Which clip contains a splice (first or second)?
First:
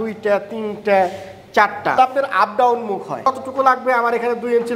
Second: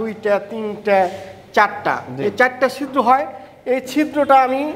first